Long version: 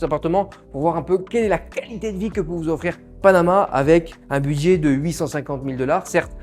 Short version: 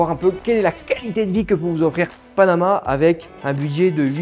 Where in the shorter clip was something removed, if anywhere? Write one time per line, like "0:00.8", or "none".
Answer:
none